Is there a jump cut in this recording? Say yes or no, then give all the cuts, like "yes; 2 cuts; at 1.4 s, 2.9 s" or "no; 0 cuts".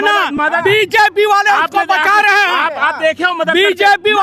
no; 0 cuts